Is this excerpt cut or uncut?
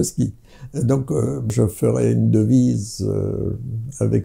cut